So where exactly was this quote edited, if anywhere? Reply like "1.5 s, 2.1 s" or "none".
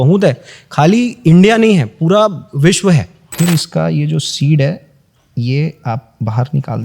3.2 s